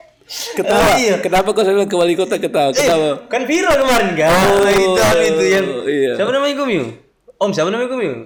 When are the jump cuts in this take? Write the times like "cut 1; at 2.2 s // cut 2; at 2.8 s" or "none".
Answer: none